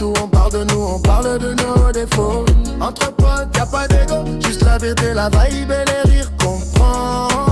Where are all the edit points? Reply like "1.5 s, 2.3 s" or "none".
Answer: none

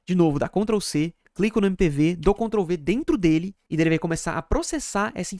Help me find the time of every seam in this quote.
3.6 s

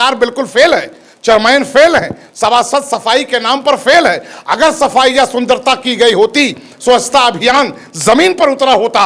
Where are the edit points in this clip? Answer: none

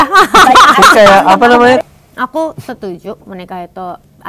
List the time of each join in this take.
1.8 s

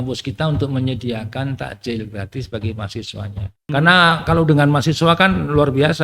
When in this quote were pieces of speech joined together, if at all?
3.6 s

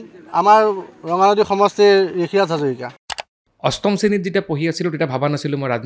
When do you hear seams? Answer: 2.9 s

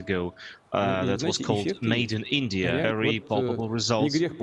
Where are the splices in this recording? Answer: 2.9 s

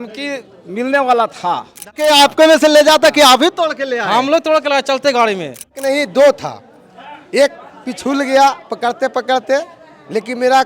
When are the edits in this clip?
2.0 s, 5.8 s

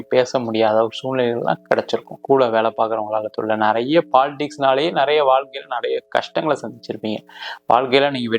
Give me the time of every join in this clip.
2.1 s

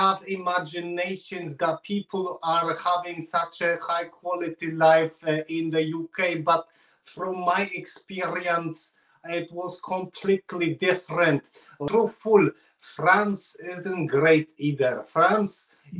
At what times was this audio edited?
11.8 s

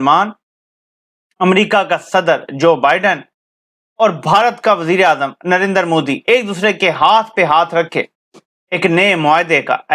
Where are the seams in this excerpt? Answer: none

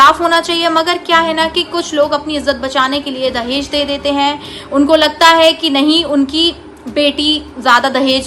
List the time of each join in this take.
none

